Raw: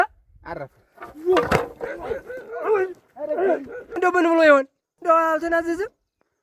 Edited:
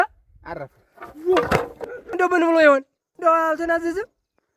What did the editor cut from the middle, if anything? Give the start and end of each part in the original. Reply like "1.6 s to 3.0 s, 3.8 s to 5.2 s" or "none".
1.9 s to 3.7 s